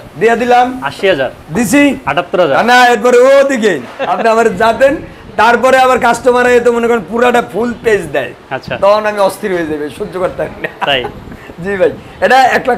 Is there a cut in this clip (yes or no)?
yes